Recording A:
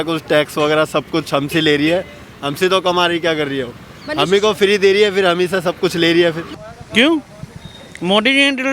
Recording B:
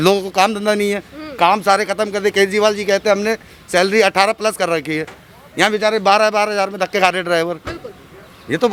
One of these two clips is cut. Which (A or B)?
A